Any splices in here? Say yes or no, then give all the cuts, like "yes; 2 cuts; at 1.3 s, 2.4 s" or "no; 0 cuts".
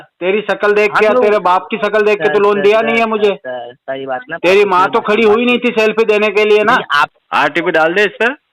yes; 1 cut; at 7.2 s